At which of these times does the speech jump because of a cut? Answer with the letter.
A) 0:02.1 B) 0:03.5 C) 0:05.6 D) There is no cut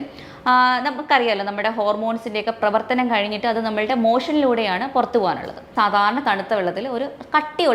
C